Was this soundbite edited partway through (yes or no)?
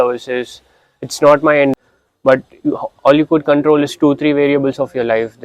yes